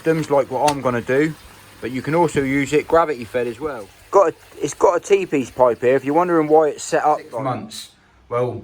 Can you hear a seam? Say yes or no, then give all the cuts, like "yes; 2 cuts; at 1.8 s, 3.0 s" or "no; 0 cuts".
yes; 2 cuts; at 3.6 s, 7.3 s